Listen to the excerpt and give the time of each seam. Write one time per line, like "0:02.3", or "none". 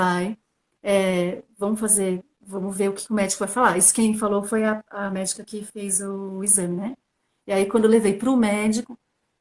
none